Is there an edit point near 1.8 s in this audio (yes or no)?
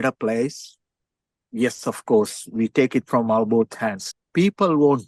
no